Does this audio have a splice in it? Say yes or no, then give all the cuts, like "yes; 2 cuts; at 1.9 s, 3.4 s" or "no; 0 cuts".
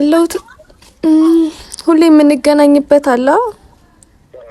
no; 0 cuts